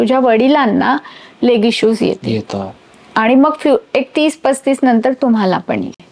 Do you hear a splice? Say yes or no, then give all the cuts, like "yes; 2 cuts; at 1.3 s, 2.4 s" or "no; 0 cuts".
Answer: no; 0 cuts